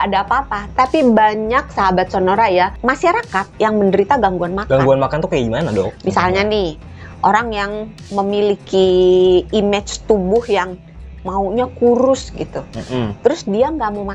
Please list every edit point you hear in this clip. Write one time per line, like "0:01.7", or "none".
none